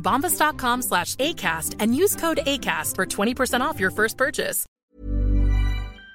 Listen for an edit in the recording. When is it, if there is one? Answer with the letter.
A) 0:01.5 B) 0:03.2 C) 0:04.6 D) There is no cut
C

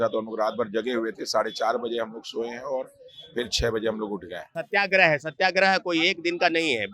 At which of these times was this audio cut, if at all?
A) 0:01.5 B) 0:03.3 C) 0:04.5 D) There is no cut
C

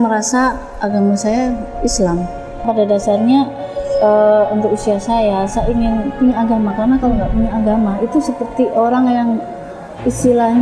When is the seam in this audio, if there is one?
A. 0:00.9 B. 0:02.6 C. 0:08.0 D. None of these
B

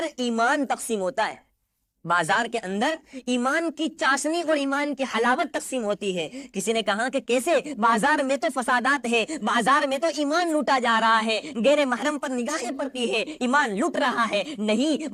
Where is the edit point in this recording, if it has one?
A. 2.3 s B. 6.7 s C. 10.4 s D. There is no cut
D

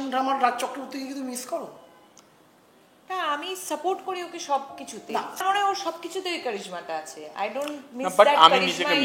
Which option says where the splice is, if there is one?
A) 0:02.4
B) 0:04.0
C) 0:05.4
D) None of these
C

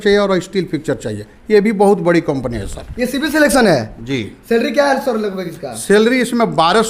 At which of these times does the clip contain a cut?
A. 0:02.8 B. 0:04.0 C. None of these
C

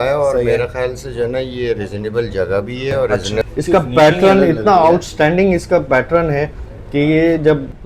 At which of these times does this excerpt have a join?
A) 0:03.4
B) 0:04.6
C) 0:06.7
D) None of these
A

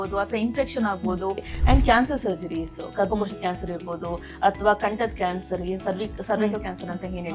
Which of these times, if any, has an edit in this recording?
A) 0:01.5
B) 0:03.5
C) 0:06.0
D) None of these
A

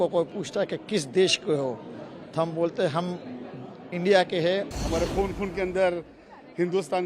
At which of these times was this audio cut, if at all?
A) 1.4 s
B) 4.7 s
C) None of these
B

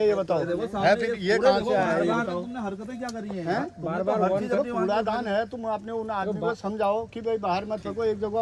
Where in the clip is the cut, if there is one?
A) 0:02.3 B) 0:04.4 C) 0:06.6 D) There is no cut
D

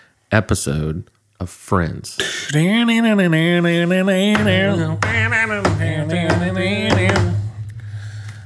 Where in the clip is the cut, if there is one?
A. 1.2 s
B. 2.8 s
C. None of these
C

